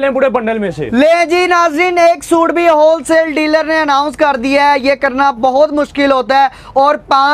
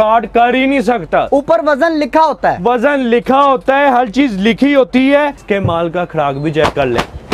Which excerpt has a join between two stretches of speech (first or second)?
second